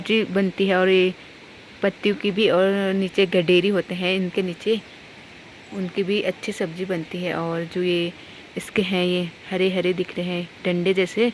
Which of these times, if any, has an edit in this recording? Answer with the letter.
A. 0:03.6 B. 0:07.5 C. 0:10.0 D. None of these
D